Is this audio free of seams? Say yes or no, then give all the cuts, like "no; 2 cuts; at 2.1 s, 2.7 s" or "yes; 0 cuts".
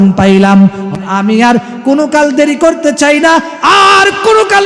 no; 1 cut; at 1.1 s